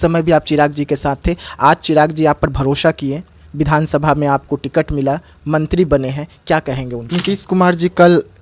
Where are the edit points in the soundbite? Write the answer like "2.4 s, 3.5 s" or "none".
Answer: 7.0 s

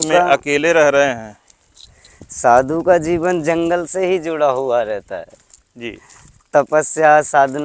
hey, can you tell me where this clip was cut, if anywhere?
none

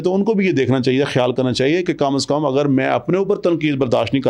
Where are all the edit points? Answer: none

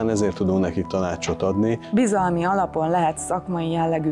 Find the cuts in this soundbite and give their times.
1.9 s

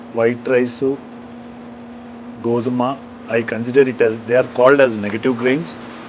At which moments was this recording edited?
none

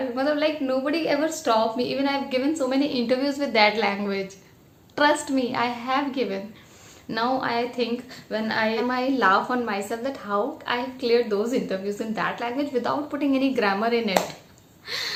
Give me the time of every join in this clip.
none

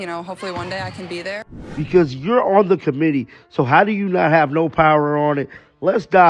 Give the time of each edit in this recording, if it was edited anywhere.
1.6 s

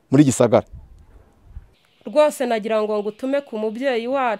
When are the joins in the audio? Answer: 1.6 s

